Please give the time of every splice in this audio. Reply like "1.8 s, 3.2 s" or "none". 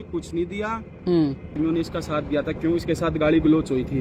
1.5 s